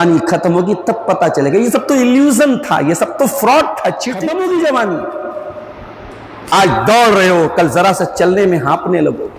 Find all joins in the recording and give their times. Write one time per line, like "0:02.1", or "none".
0:04.2